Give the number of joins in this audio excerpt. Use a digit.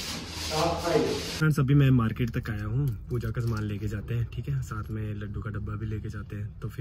1